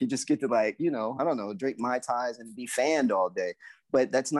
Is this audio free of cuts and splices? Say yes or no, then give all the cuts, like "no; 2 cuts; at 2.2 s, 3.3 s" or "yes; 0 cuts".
yes; 0 cuts